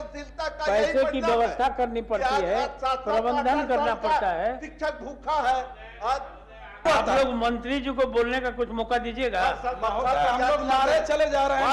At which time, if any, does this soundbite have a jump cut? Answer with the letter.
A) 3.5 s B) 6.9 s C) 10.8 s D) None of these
B